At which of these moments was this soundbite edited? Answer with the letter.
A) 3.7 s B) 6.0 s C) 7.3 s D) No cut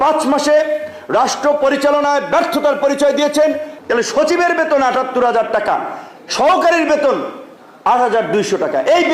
A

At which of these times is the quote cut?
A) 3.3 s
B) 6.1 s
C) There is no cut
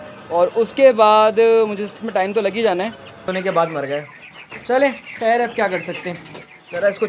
A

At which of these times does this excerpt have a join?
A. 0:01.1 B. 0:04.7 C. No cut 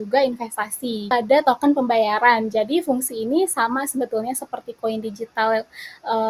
A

